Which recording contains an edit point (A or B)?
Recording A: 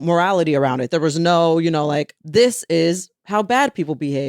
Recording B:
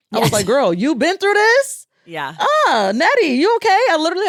A